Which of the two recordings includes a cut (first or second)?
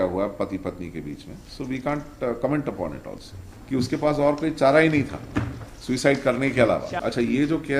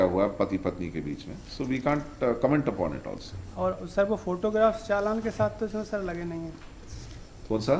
first